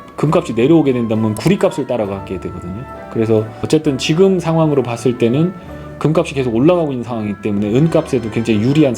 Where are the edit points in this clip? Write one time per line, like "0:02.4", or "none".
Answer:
none

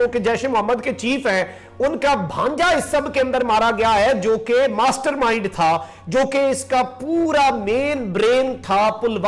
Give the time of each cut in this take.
none

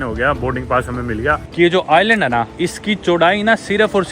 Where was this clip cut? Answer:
0:01.5
0:02.5

